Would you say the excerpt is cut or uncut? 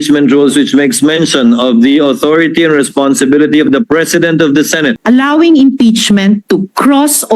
cut